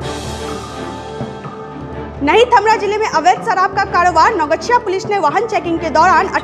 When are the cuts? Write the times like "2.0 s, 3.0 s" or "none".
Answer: 1.7 s

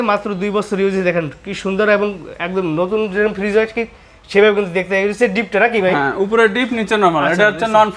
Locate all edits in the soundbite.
none

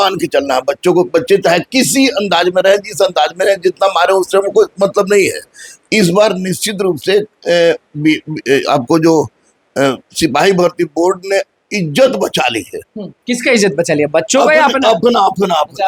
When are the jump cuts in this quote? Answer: none

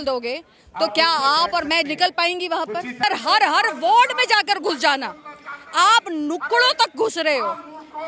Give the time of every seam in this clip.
3.0 s

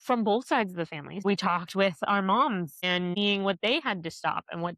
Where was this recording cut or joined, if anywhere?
1.2 s, 3.1 s

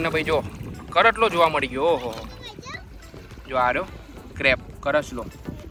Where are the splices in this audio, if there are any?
none

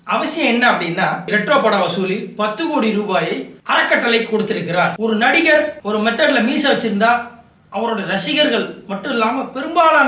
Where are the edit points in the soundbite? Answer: 1.3 s, 5.0 s

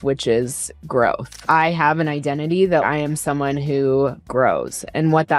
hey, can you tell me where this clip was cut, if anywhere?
1.3 s, 2.8 s, 4.2 s

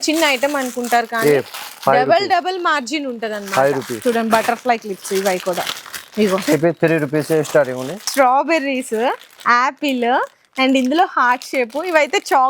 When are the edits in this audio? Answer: 3.9 s, 7.9 s

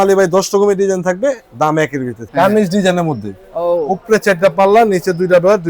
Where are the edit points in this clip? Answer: 2.2 s

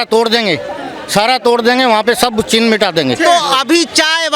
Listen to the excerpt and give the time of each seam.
3.2 s

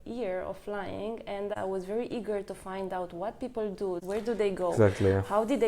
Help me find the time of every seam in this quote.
1.6 s, 4.0 s

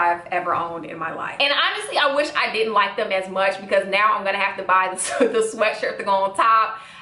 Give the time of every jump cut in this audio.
1.2 s

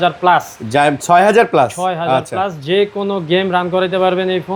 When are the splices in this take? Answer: none

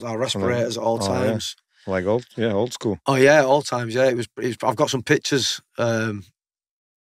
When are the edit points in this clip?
none

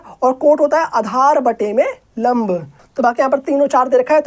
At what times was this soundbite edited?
2.8 s

